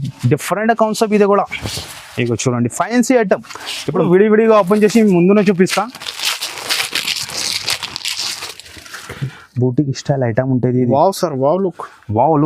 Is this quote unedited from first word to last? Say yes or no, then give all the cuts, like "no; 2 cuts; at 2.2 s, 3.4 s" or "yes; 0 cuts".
no; 1 cut; at 4.0 s